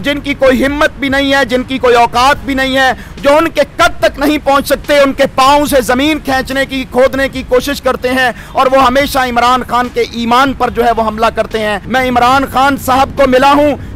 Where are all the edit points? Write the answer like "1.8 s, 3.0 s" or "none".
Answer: 11.8 s